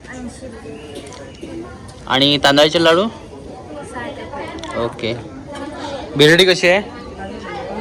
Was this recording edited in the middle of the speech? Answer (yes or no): no